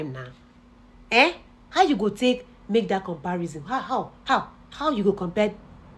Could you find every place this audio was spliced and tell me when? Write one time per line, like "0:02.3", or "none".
none